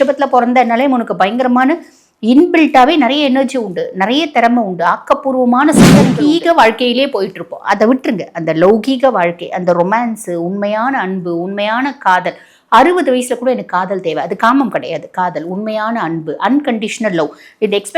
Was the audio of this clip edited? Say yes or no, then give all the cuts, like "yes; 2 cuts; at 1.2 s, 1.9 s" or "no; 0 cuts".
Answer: yes; 1 cut; at 6.1 s